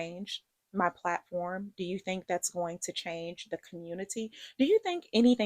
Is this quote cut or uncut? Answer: uncut